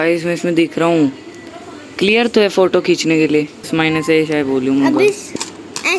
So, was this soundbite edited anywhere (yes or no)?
yes